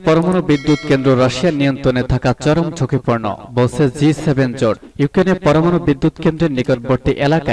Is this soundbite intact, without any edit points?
yes; 0 cuts

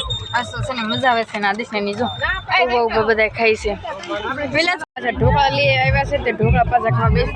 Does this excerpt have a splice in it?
yes; 1 cut; at 4.8 s

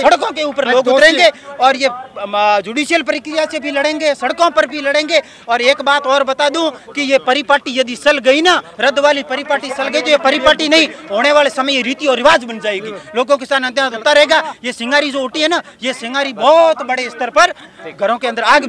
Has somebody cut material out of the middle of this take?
no; 0 cuts

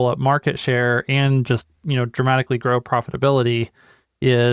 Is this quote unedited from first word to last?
yes; 0 cuts

